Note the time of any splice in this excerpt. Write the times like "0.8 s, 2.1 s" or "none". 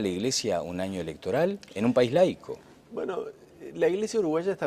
3.8 s

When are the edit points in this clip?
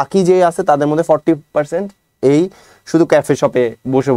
none

